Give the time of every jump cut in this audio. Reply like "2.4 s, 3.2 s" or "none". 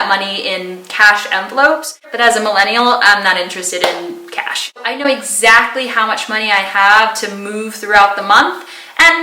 2.0 s, 5.0 s